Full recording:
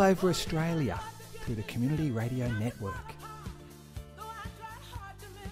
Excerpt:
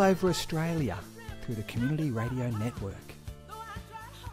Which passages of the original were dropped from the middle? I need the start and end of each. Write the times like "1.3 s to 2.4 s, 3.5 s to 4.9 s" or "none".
2.9 s to 3.6 s